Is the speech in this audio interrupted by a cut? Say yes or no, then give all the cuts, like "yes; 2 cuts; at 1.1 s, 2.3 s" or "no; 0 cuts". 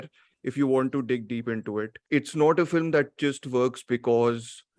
yes; 1 cut; at 2.0 s